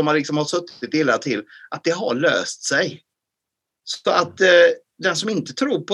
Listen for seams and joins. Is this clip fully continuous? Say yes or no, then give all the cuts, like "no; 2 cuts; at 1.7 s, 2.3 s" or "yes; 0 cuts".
yes; 0 cuts